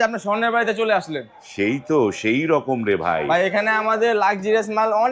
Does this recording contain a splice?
no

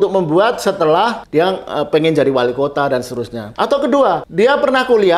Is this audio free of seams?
no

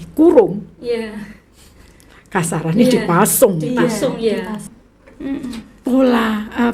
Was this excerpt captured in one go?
no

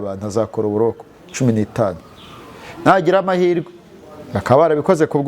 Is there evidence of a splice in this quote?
no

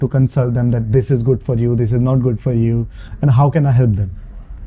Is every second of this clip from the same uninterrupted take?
yes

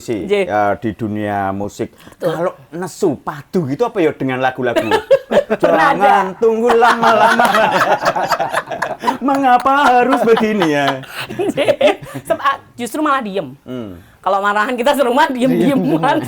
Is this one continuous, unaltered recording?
yes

